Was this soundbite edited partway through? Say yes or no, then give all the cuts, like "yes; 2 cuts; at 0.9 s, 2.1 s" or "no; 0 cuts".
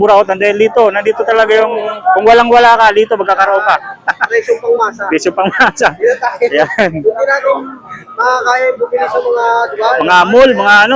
no; 0 cuts